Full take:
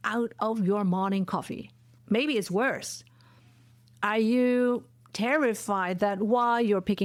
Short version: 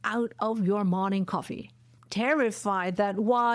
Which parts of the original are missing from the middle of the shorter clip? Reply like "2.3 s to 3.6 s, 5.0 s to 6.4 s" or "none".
1.9 s to 4.9 s